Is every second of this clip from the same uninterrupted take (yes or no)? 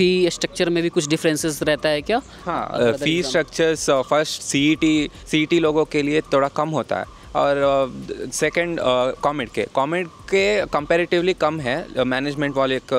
yes